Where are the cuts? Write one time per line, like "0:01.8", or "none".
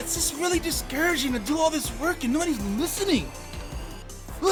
none

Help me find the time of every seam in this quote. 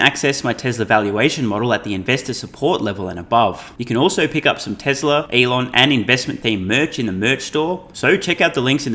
0:03.7
0:05.3
0:07.9

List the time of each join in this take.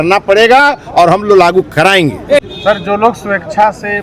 0:02.4

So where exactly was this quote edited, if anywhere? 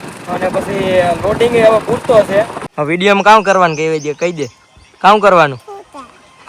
0:02.6

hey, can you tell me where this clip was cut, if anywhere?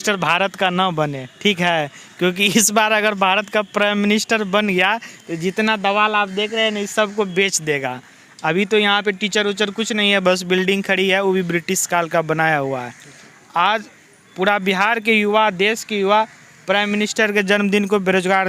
none

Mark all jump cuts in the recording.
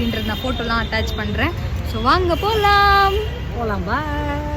none

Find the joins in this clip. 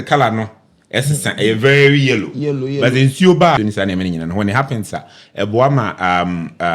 0:03.6

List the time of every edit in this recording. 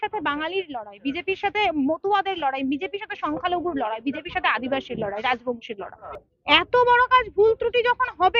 none

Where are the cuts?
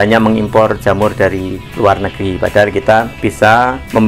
0:01.6
0:03.1

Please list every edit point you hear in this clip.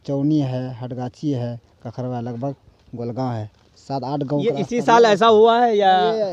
none

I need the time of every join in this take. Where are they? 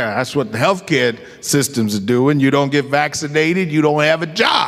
none

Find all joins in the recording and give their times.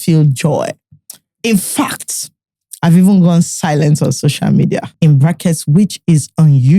0:04.9

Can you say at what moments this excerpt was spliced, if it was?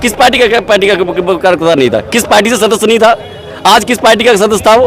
none

